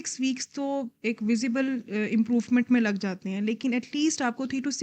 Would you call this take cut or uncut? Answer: uncut